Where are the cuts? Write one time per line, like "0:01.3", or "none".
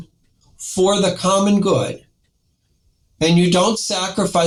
none